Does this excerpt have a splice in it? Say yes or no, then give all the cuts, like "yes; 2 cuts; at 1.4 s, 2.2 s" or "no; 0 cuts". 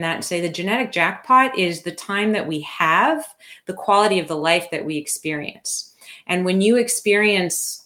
no; 0 cuts